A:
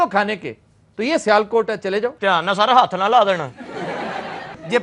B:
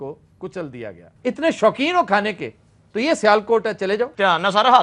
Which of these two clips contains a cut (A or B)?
B